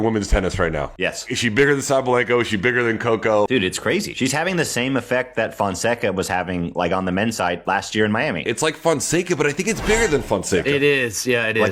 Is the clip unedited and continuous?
yes; 0 cuts

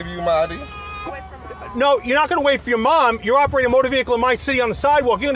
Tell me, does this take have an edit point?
yes; 1 cut; at 1.0 s

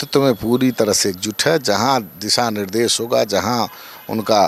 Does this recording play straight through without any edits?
yes; 0 cuts

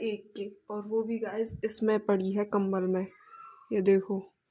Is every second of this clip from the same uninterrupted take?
yes; 0 cuts

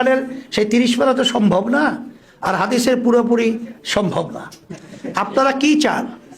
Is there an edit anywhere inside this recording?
yes; 1 cut; at 5.2 s

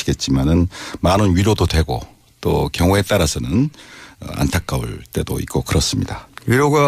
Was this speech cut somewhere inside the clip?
yes; 1 cut; at 1.2 s

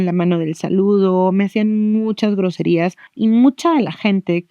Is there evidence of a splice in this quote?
yes; 1 cut; at 3.0 s

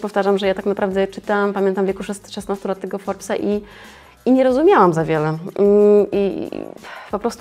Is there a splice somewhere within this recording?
no; 0 cuts

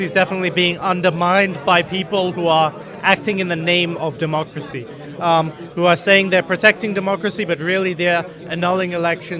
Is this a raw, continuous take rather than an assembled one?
yes; 0 cuts

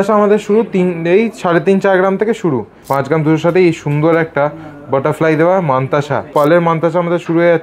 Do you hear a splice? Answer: yes; 2 cuts; at 2.8 s, 6.3 s

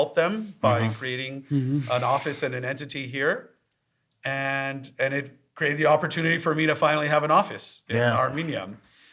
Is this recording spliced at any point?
no; 0 cuts

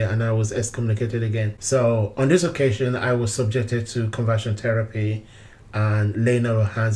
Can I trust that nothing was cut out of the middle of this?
no; 1 cut; at 1.6 s

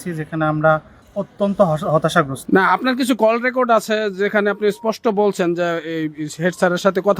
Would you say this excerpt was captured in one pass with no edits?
no; 1 cut; at 2.4 s

